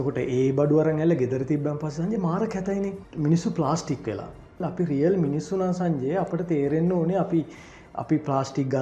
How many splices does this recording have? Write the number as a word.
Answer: two